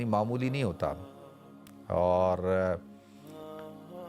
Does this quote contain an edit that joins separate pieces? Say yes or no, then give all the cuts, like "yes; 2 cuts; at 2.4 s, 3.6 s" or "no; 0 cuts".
no; 0 cuts